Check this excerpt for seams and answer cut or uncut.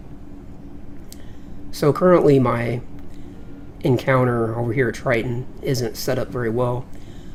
uncut